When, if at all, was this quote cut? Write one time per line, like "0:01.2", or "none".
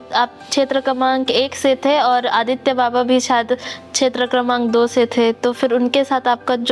none